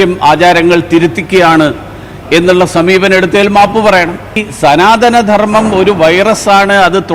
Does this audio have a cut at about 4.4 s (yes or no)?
yes